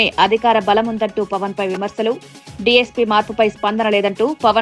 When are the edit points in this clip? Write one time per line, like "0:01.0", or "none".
none